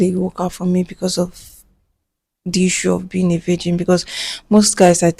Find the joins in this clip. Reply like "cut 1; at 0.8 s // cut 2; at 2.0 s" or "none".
none